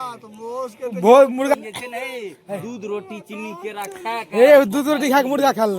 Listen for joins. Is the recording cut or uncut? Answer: cut